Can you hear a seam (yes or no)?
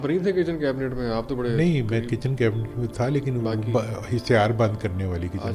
no